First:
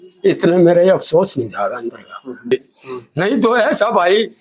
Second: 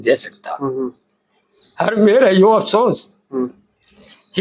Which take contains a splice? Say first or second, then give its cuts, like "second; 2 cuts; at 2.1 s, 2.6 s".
first; 1 cut; at 2.5 s